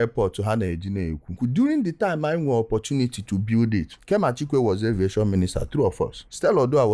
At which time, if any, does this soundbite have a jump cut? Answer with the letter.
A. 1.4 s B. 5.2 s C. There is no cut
A